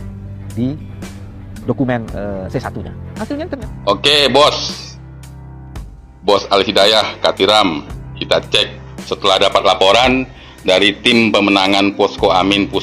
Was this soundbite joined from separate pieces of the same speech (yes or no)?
yes